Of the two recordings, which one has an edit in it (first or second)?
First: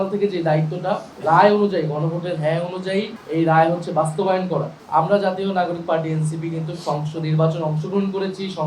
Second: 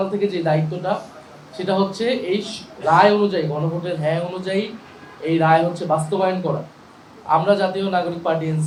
first